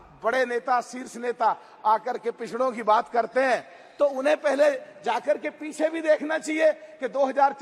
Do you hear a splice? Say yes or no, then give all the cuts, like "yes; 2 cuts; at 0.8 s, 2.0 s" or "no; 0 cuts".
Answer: no; 0 cuts